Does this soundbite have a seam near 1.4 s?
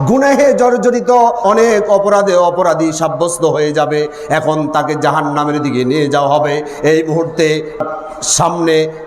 yes; 1 cut; at 1.4 s

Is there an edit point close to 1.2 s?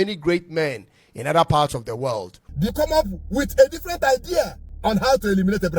no; 2 cuts; at 2.6 s, 4.6 s

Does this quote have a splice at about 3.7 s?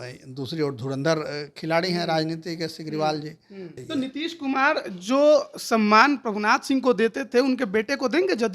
yes; 1 cut; at 3.7 s

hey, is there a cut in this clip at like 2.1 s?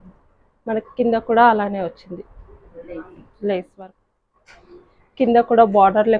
no; 1 cut; at 3.7 s

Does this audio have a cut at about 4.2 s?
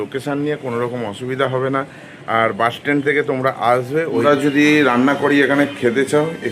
yes; 1 cut; at 4.2 s

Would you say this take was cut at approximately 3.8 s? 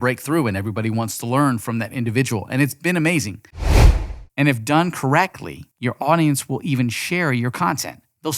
yes; 1 cut; at 3.8 s

